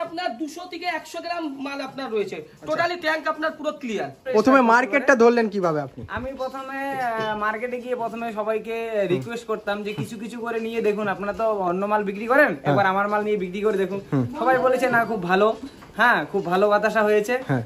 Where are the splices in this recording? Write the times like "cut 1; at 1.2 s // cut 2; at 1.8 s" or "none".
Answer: cut 1; at 4.2 s